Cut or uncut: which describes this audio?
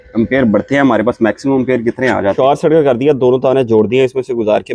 cut